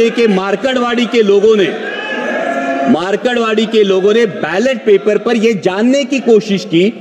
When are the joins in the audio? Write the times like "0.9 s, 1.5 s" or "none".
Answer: none

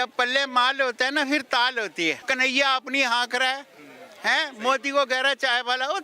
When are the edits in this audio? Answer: 2.2 s

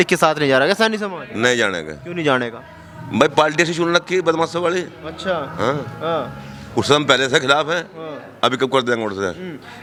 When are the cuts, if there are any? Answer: none

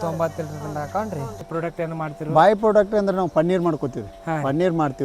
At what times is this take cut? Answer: 1.5 s

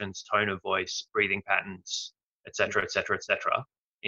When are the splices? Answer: none

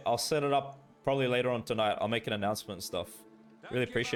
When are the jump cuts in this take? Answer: none

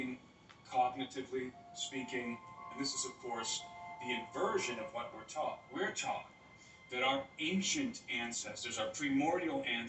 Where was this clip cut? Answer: 2.7 s

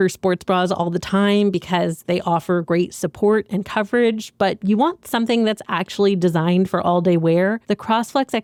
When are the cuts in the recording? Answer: none

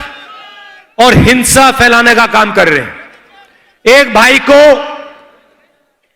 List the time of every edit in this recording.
none

